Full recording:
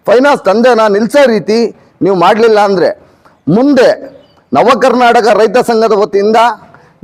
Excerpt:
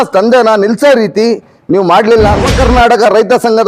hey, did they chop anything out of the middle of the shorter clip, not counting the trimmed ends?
yes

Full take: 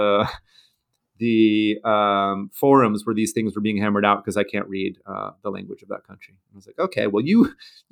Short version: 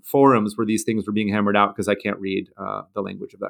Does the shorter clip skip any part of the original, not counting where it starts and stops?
no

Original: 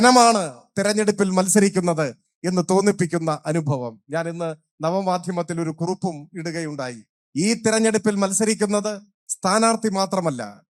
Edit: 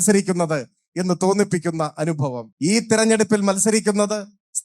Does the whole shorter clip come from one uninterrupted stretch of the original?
no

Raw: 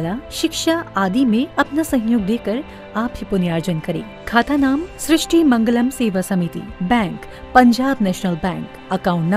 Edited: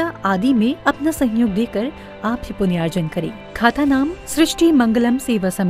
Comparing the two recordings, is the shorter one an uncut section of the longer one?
yes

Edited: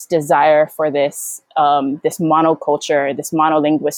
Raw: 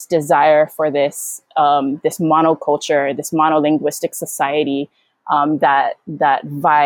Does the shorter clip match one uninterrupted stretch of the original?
yes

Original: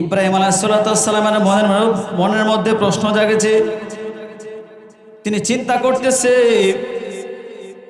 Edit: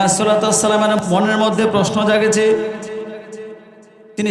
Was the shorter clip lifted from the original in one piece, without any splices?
no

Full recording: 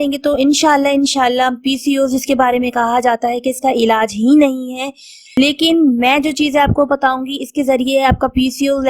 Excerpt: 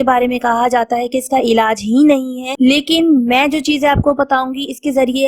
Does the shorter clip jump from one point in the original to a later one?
yes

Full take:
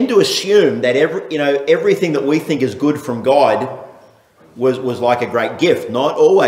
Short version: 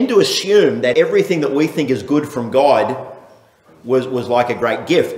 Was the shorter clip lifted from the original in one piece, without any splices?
no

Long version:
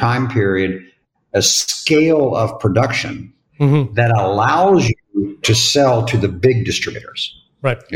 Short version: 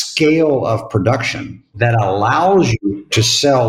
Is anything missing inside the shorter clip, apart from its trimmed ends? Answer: yes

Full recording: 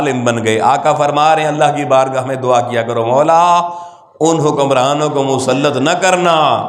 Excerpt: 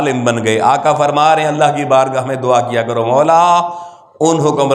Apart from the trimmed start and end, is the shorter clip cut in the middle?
no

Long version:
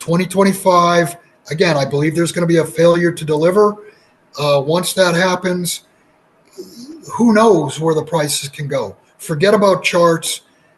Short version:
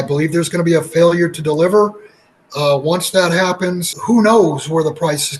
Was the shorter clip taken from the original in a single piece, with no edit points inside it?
no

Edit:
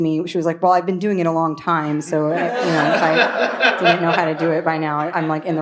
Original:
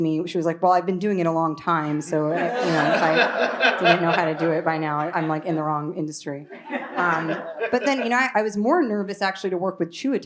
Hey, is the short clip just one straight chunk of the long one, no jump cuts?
yes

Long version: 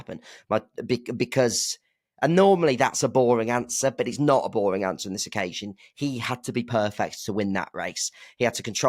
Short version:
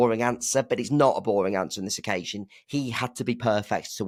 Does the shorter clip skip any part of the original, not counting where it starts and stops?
no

